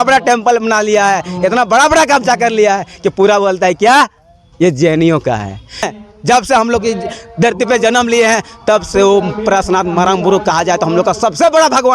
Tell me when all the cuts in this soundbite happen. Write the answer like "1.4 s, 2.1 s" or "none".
5.8 s

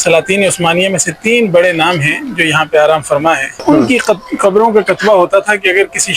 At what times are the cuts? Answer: 3.6 s

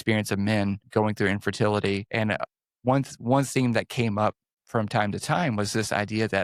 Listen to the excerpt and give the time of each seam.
0.8 s, 2.6 s, 4.5 s

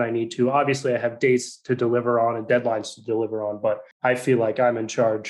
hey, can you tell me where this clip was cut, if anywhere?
3.9 s

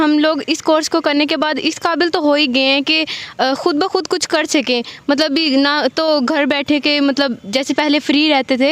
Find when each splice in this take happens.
none

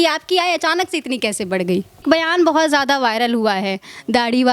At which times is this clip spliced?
2.0 s

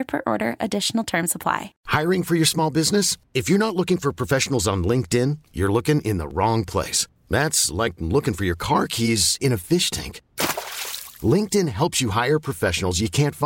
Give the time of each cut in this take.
none

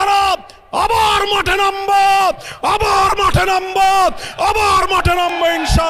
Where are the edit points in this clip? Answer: none

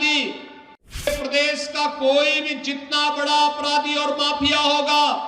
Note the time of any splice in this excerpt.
1.1 s

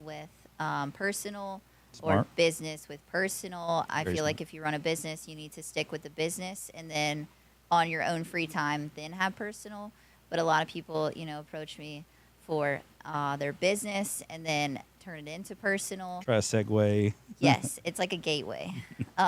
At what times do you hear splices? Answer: none

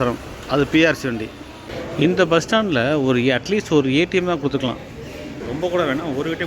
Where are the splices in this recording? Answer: 1.7 s

